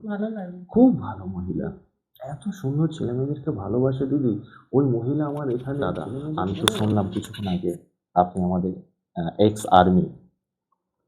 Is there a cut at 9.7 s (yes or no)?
no